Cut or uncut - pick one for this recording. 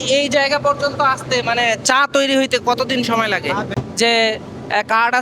cut